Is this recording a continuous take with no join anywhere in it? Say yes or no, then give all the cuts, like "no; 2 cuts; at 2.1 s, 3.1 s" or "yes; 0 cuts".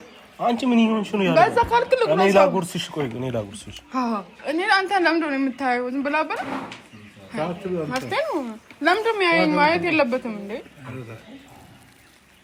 yes; 0 cuts